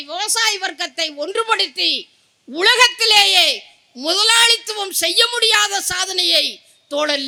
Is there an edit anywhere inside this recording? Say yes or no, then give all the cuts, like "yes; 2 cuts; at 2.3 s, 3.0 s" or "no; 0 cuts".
no; 0 cuts